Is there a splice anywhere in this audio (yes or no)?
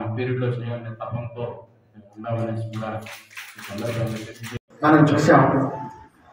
yes